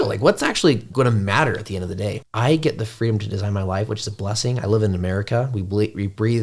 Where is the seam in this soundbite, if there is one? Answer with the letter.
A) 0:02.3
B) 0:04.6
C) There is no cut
A